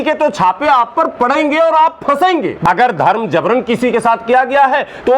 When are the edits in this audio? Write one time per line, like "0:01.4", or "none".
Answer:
0:02.6